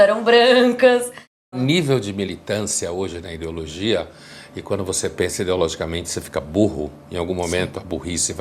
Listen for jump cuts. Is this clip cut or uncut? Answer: cut